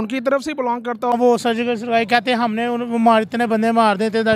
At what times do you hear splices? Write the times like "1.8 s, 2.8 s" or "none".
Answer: 1.1 s